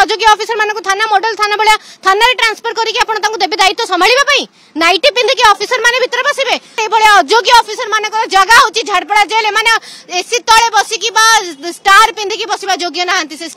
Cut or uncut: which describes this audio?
cut